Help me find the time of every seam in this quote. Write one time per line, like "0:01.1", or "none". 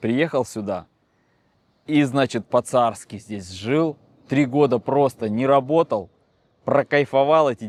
none